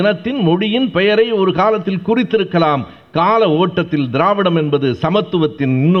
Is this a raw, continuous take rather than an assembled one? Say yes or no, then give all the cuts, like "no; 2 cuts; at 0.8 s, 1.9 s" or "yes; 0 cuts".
yes; 0 cuts